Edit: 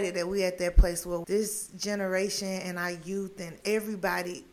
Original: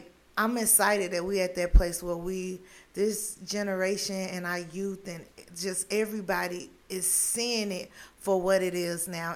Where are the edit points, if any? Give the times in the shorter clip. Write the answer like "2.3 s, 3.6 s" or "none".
1.2 s, 3.6 s